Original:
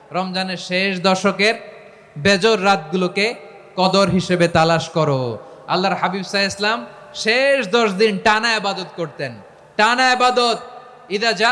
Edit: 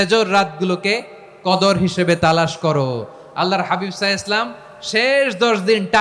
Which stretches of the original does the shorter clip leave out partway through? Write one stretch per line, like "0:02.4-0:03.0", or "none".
none